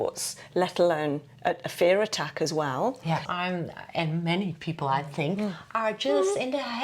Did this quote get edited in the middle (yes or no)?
yes